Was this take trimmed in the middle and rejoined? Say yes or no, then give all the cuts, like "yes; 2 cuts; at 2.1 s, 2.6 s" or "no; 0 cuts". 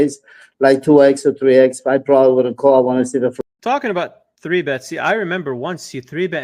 yes; 1 cut; at 3.3 s